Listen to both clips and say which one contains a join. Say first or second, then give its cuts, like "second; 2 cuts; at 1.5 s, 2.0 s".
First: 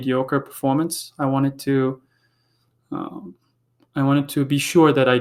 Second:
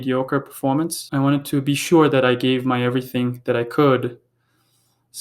second; 1 cut; at 1.0 s